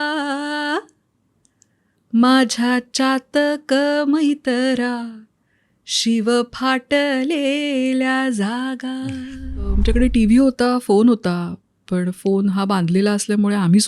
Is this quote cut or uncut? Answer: cut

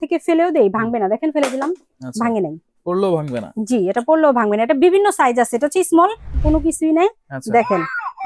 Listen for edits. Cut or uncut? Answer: cut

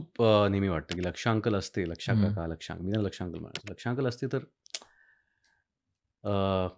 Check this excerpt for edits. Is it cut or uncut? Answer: uncut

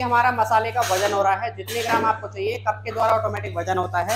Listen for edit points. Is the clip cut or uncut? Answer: uncut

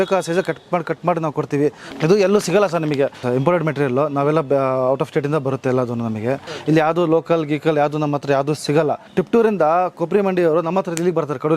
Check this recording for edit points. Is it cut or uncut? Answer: cut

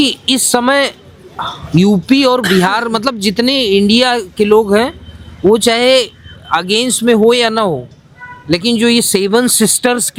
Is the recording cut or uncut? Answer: uncut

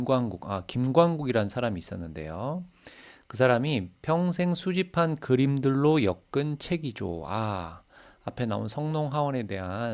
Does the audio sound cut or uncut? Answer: uncut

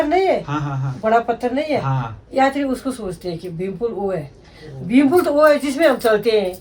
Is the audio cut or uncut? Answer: uncut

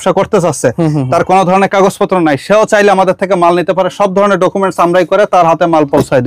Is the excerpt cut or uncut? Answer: uncut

